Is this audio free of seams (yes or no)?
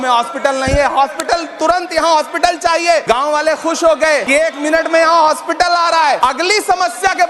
no